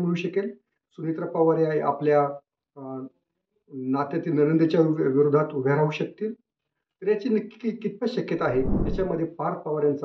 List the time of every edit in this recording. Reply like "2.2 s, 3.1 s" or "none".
8.8 s